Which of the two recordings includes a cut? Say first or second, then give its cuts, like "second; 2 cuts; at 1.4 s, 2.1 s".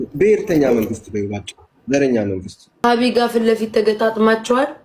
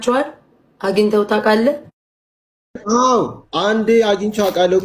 first; 1 cut; at 2.8 s